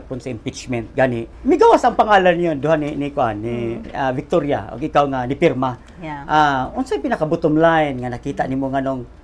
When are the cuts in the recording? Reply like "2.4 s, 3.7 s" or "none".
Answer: 1.3 s

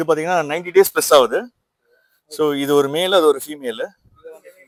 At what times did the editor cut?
none

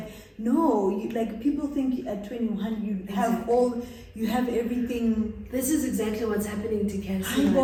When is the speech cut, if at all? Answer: none

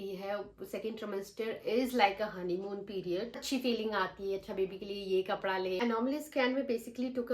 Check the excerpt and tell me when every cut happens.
3.4 s, 5.8 s

